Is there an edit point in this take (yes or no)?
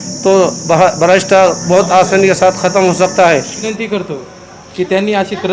yes